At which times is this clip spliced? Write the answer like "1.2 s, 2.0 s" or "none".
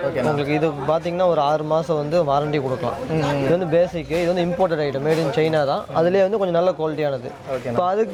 none